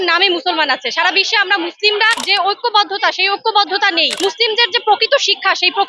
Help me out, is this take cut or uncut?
cut